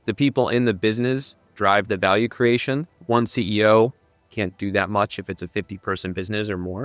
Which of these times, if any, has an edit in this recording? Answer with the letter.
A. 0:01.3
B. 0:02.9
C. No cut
B